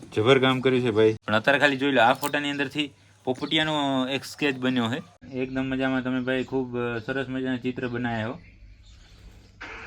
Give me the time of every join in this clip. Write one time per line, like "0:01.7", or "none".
0:01.2
0:05.2